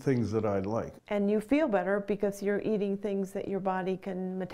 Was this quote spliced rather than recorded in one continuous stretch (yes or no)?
yes